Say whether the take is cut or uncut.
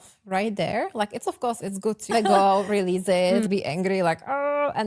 uncut